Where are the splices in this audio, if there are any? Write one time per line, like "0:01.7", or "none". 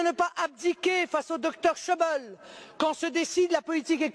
0:02.0